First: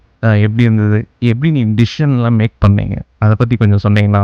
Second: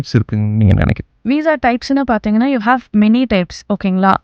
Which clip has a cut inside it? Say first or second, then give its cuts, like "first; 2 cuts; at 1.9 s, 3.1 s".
second; 1 cut; at 1.1 s